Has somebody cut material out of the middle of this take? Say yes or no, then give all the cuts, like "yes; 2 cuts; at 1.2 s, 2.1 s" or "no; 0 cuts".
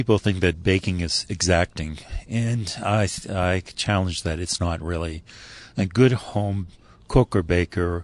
no; 0 cuts